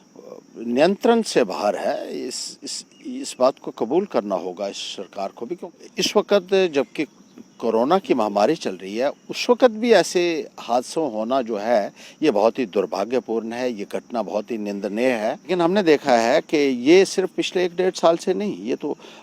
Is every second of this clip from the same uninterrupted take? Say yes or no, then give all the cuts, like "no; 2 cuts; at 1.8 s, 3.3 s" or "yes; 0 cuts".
no; 2 cuts; at 5.6 s, 15.5 s